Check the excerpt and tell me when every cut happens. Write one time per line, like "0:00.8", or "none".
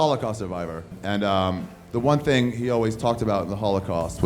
0:00.9